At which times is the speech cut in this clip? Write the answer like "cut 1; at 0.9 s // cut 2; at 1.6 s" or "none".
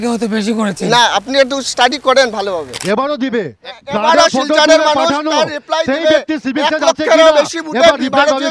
cut 1; at 2.7 s